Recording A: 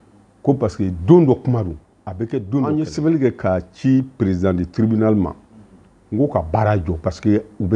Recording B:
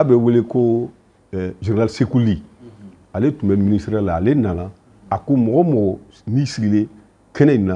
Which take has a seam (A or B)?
A